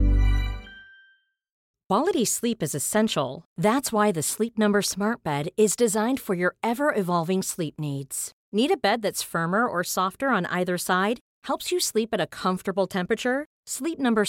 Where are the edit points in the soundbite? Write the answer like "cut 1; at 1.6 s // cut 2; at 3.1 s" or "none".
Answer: cut 1; at 1.8 s